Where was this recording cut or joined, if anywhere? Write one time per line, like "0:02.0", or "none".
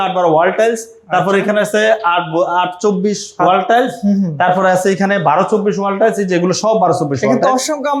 none